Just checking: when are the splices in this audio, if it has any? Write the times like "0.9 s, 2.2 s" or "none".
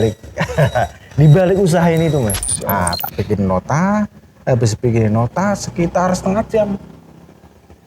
2.5 s